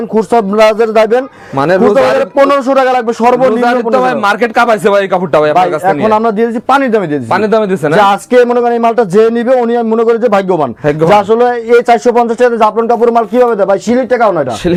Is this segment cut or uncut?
uncut